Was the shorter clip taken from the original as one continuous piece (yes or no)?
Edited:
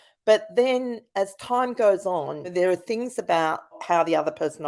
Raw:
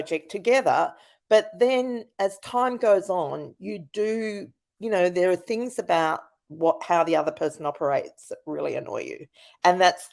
no